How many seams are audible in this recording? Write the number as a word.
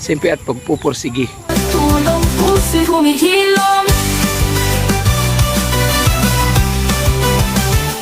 one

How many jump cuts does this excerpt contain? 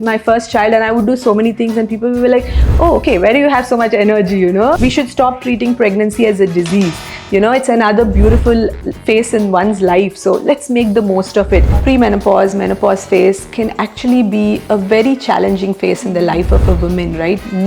two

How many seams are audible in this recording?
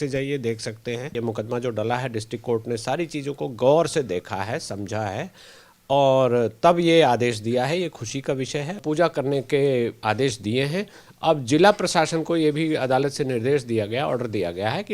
two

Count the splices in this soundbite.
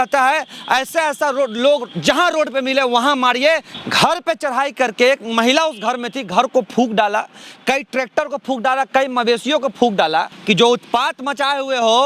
two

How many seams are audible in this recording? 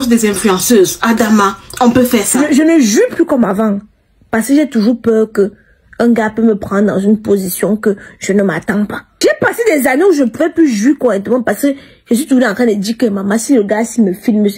two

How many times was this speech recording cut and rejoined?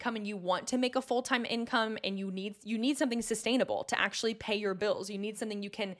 zero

